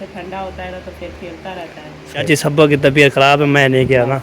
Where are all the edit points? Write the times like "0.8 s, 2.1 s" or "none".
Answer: 2.2 s

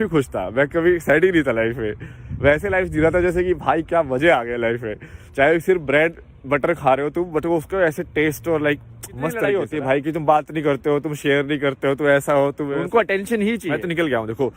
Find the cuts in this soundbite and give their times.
9.4 s, 12.8 s, 13.7 s

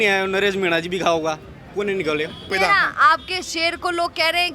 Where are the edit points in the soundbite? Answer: 2.5 s

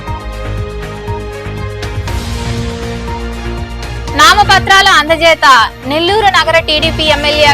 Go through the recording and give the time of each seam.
1.8 s

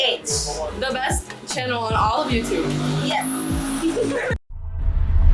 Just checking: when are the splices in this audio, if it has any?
none

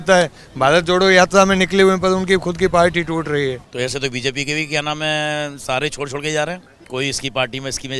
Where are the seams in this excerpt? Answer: 3.7 s, 6.7 s

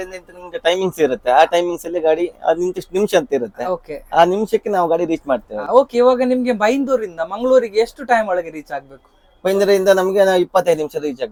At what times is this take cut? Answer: none

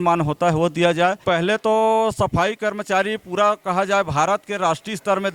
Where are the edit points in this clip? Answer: 1.2 s

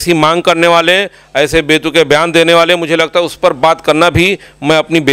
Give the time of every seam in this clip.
none

